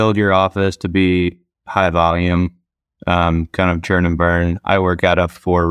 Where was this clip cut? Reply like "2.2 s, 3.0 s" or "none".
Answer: none